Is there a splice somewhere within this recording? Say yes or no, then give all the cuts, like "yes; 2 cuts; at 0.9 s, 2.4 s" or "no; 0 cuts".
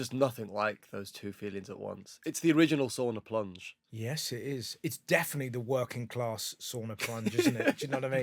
no; 0 cuts